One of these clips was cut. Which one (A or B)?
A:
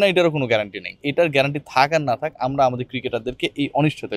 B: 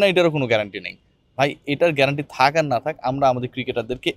A